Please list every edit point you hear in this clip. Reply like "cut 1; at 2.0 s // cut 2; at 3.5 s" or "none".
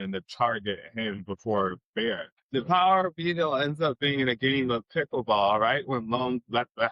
cut 1; at 2.3 s